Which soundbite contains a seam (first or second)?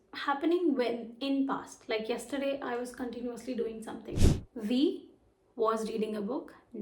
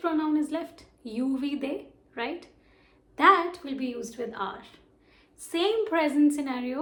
first